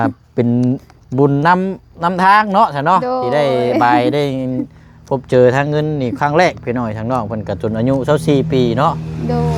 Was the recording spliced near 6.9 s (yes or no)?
no